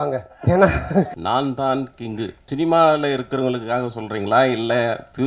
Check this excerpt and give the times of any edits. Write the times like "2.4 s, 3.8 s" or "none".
1.2 s, 2.4 s